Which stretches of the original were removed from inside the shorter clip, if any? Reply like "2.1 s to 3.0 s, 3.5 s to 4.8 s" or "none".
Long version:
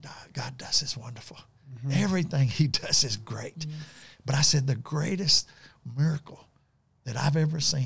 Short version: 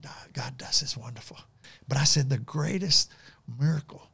1.6 s to 4.0 s